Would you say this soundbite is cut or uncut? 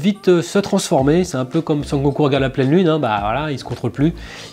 uncut